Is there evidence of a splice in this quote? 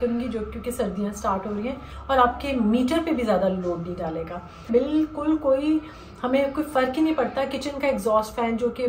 yes; 2 cuts; at 1.9 s, 4.6 s

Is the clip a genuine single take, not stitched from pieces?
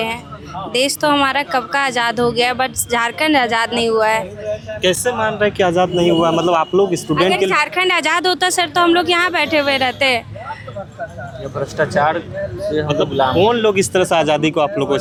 yes; 0 cuts

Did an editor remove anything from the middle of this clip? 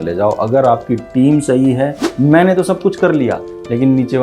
yes; 1 cut; at 2.0 s

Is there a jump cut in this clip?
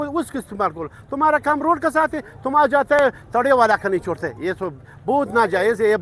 no; 0 cuts

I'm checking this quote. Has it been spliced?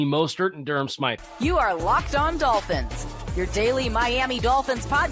no; 0 cuts

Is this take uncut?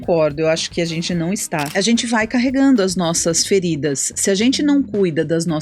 no; 1 cut; at 1.7 s

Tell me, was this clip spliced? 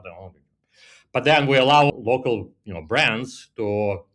yes; 1 cut; at 1.9 s

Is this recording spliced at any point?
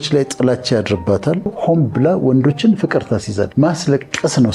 yes; 2 cuts; at 1.5 s, 3.5 s

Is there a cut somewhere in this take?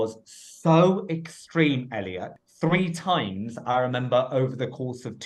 yes; 1 cut; at 2.3 s

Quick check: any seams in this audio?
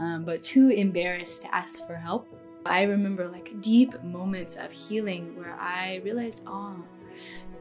yes; 1 cut; at 2.7 s

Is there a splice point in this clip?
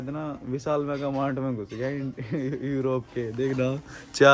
no; 0 cuts

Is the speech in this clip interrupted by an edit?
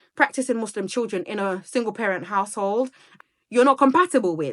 yes; 1 cut; at 3.1 s

